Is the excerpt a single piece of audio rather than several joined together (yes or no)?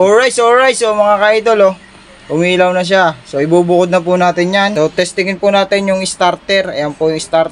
no